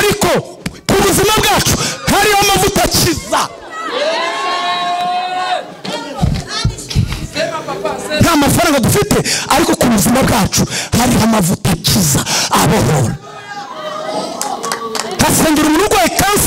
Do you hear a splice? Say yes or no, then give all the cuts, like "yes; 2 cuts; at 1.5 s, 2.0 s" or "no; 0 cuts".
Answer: no; 0 cuts